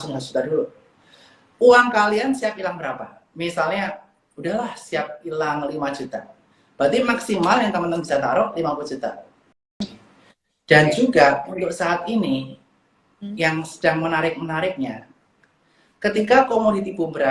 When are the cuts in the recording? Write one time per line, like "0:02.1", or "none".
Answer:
0:09.8

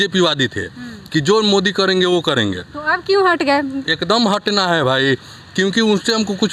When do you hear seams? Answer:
none

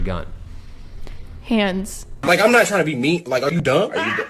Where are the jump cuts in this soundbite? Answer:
0:02.2

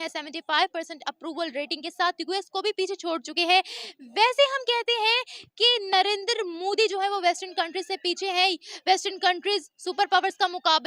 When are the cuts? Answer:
none

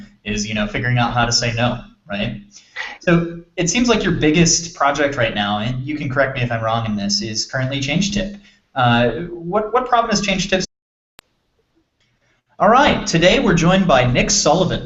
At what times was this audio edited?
none

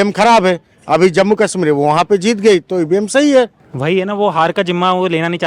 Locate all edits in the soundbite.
0:03.6

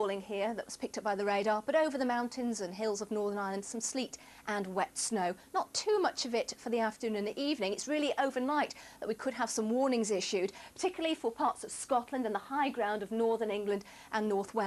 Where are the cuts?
0:08.0

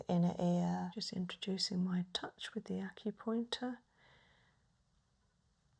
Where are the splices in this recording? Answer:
0:01.0

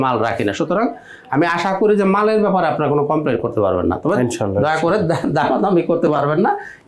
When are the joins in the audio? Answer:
none

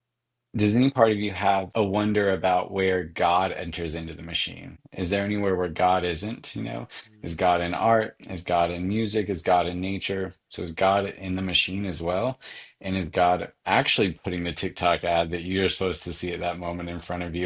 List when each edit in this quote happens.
0:01.7
0:04.8

